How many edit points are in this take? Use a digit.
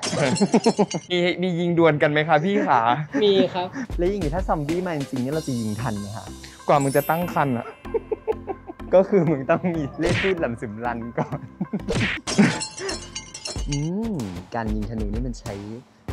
2